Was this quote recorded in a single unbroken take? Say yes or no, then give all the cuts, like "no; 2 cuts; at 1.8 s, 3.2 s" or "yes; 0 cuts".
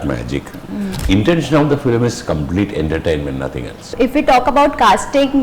no; 2 cuts; at 0.9 s, 3.8 s